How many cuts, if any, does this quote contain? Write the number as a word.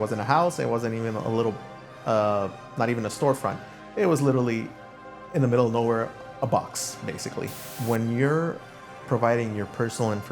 one